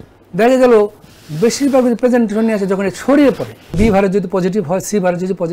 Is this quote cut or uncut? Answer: cut